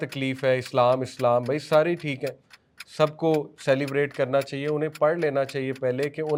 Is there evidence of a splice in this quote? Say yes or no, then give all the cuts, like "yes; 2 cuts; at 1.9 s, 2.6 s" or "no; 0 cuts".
no; 0 cuts